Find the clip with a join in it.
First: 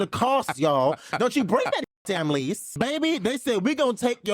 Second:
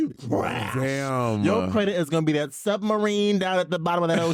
first; 1 cut; at 2.7 s

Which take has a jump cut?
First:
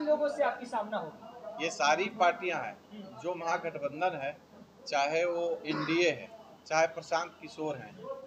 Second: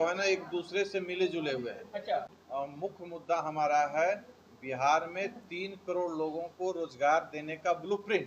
second; 1 cut; at 2.3 s

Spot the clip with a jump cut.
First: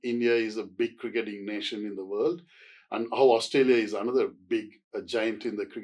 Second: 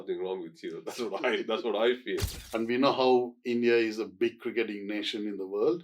second; 1 cut; at 2.4 s

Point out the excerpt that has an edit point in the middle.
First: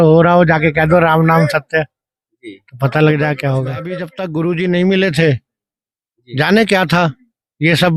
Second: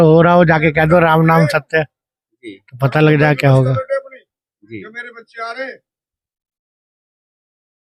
first; 1 cut; at 4.1 s

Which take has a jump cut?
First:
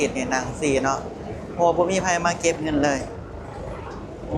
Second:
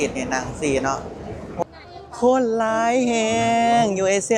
second; 1 cut; at 1.6 s

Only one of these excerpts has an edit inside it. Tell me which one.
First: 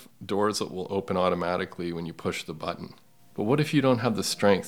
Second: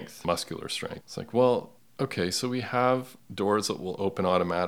second; 1 cut; at 1.8 s

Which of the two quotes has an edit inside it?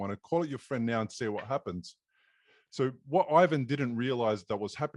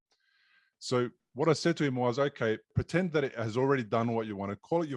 second; 1 cut; at 2.8 s

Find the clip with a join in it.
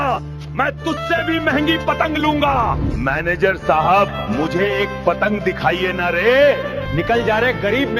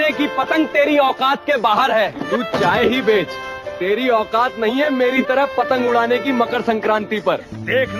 second; 1 cut; at 5.4 s

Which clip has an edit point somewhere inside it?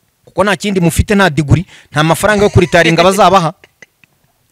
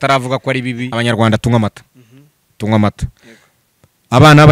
second; 1 cut; at 0.9 s

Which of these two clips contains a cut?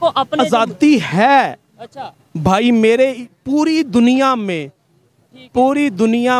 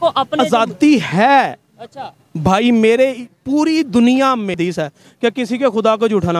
second; 1 cut; at 4.6 s

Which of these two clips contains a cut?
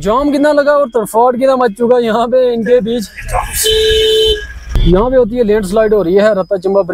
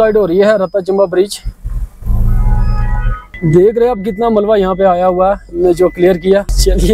second; 1 cut; at 3.4 s

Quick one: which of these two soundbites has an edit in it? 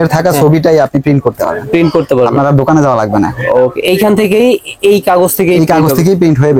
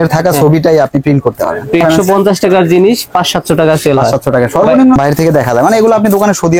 second; 2 cuts; at 1.8 s, 5.0 s

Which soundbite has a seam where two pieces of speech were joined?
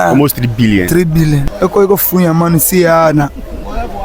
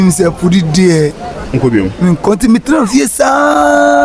first; 1 cut; at 1.5 s

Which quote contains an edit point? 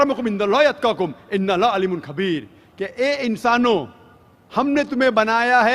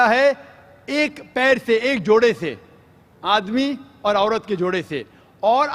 first; 1 cut; at 3.4 s

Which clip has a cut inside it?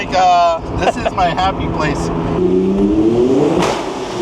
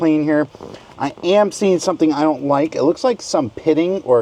first; 1 cut; at 2.4 s

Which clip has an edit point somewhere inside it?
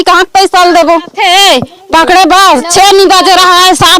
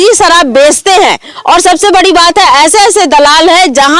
first; 1 cut; at 1.1 s

